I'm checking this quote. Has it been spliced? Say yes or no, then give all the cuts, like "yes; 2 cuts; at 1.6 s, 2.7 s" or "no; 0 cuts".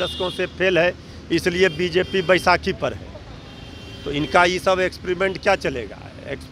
no; 0 cuts